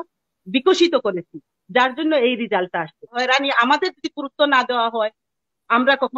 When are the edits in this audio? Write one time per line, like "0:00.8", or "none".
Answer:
0:03.1